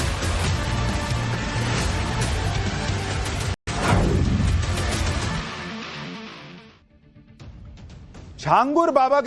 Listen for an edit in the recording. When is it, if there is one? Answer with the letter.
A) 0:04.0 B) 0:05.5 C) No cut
C